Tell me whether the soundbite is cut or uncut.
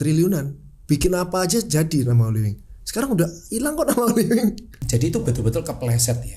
cut